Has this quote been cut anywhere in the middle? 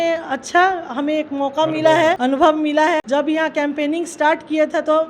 yes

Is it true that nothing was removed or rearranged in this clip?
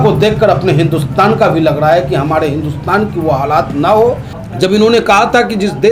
no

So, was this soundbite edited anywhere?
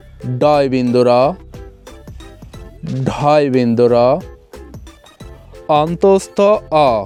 no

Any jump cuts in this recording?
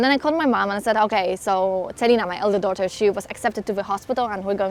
no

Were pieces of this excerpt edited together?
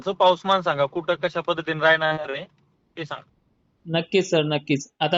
no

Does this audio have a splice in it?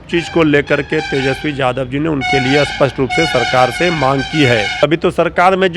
yes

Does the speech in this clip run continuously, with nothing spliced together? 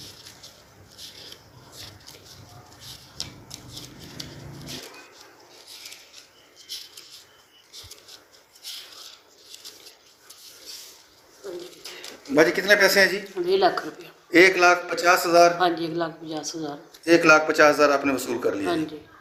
yes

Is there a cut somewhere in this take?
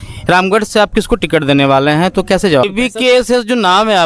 yes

